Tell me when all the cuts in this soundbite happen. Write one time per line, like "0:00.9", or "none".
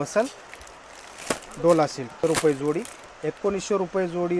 0:02.1